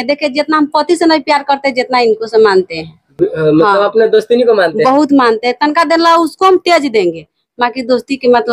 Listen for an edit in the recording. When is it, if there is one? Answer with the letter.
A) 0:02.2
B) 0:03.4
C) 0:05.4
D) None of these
D